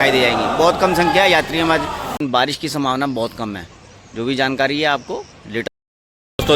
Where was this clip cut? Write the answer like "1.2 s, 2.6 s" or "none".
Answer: 2.2 s, 5.6 s

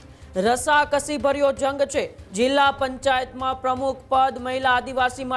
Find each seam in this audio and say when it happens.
2.2 s

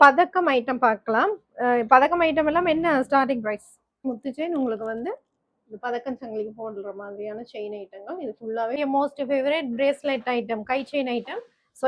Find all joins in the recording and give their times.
4.1 s, 8.8 s

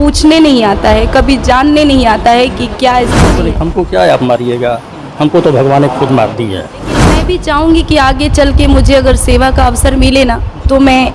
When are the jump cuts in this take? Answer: 3.4 s, 7.2 s

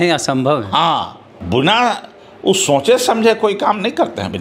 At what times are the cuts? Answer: 1.3 s

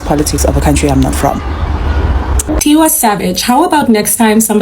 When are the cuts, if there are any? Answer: 2.5 s

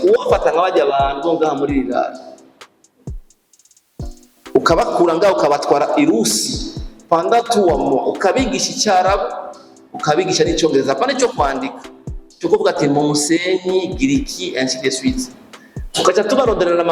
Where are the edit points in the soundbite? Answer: none

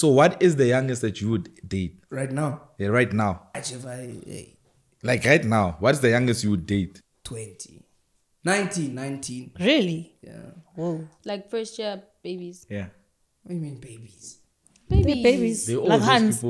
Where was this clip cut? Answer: 2.0 s, 3.5 s, 11.1 s

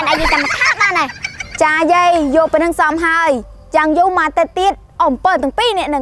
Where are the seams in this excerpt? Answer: none

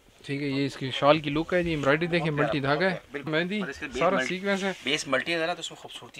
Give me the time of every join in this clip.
3.3 s

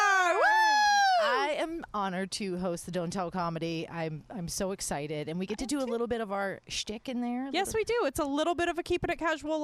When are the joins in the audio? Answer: none

